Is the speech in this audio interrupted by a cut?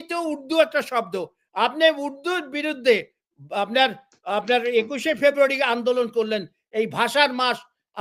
no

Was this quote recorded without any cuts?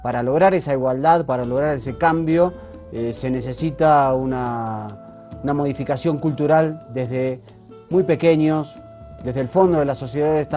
no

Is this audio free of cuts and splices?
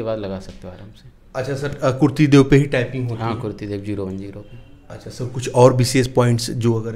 yes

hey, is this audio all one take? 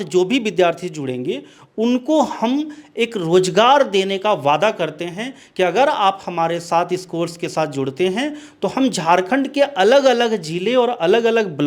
yes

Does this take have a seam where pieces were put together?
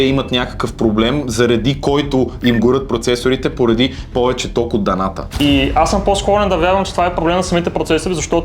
no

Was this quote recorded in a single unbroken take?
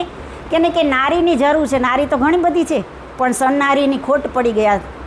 yes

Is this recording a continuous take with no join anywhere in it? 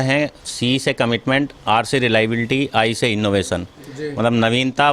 yes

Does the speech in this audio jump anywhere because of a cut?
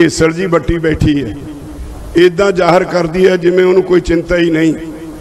no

